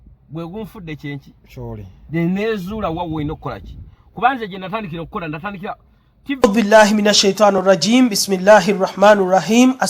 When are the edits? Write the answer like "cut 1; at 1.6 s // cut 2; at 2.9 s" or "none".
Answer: cut 1; at 6.4 s

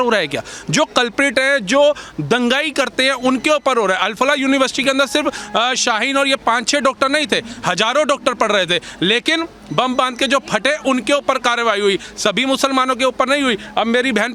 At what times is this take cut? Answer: none

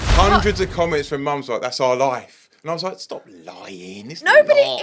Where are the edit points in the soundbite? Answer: none

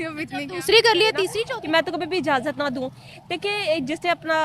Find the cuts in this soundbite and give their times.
cut 1; at 1.4 s

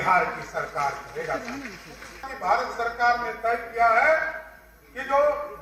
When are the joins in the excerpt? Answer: cut 1; at 2.3 s

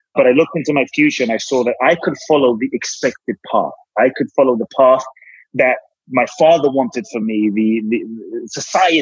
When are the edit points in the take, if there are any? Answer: none

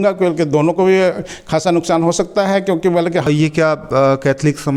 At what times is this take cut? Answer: cut 1; at 3.3 s

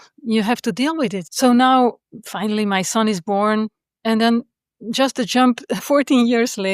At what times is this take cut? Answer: cut 1; at 1.2 s // cut 2; at 2.1 s // cut 3; at 5.8 s

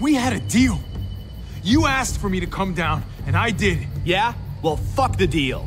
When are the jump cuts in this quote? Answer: none

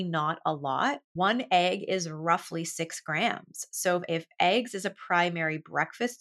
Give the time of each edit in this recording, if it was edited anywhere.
cut 1; at 1.1 s // cut 2; at 4.0 s

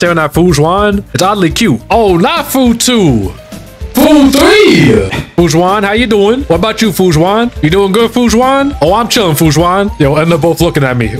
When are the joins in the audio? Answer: cut 1; at 1.8 s

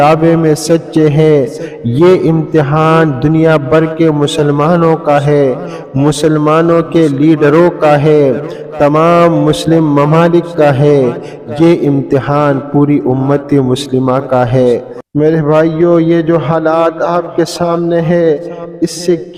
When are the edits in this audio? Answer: none

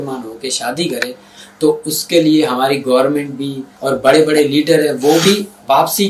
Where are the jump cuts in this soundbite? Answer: cut 1; at 3.7 s

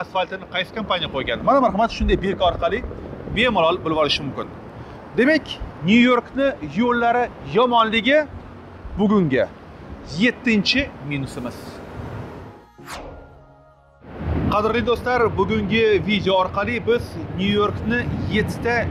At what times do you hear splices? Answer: none

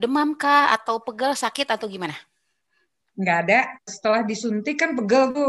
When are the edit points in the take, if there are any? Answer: cut 1; at 3.9 s

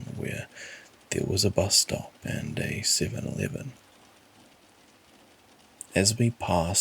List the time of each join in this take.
cut 1; at 4.4 s // cut 2; at 5.9 s

